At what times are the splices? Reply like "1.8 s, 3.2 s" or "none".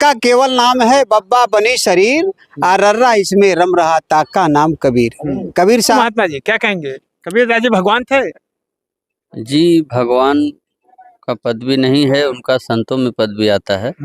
6.0 s